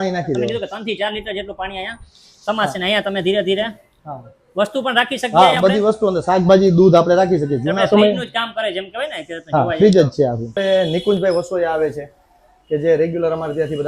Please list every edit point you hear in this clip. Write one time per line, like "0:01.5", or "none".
0:10.6